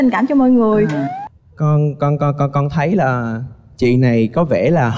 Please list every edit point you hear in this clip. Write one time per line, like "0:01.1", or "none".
0:01.2